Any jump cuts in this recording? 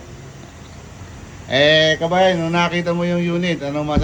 no; 0 cuts

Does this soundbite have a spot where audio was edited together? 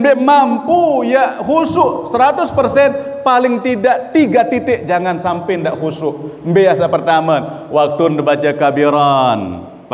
no; 0 cuts

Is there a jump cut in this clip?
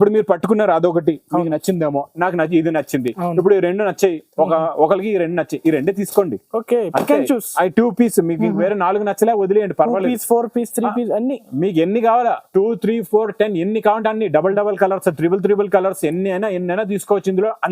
no; 0 cuts

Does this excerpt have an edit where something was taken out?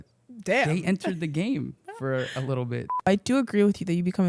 yes; 1 cut; at 3.1 s

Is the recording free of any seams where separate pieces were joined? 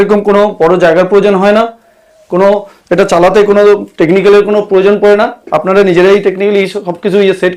yes; 0 cuts

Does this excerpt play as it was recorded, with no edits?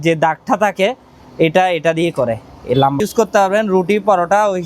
no; 1 cut; at 3.0 s

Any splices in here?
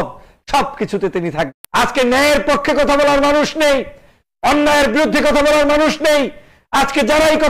yes; 1 cut; at 1.5 s

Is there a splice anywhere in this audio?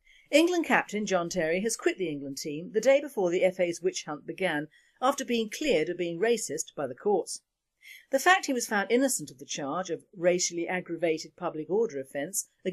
no; 0 cuts

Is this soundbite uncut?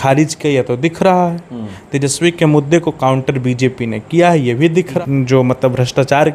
no; 1 cut; at 5.0 s

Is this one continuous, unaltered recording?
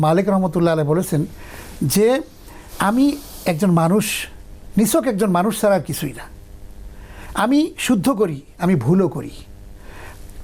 yes; 0 cuts

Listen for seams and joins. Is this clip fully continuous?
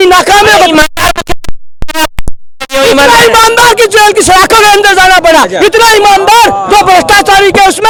yes; 0 cuts

